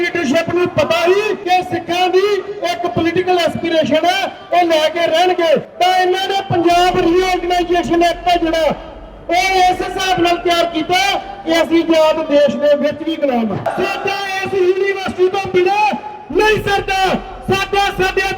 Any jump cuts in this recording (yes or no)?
yes